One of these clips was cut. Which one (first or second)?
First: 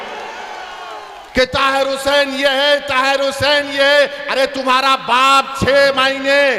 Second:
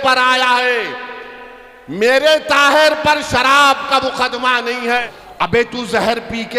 second